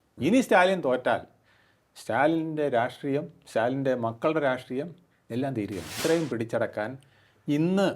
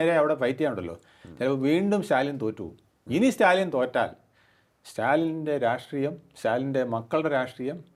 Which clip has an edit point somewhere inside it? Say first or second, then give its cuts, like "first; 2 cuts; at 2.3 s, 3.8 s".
first; 1 cut; at 6.0 s